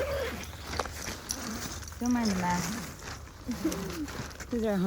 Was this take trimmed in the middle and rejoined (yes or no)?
no